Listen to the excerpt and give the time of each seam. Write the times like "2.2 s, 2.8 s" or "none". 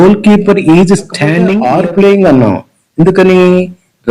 1.6 s